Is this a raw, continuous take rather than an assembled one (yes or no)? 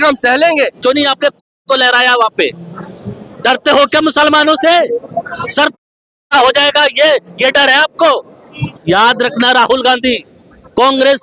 no